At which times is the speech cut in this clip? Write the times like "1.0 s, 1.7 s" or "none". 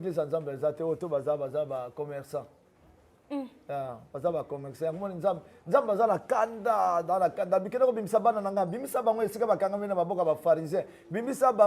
none